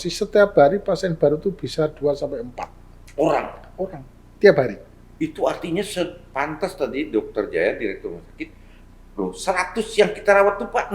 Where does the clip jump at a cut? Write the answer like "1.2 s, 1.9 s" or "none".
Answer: none